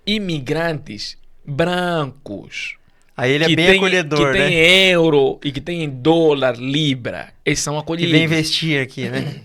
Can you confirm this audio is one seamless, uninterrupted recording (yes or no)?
yes